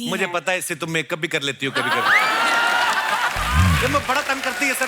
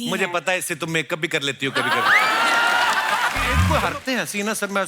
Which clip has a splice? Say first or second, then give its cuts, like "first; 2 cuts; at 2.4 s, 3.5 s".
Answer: second; 1 cut; at 3.7 s